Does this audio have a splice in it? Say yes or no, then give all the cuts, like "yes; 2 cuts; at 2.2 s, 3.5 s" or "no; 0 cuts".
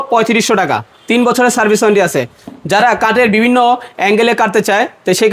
no; 0 cuts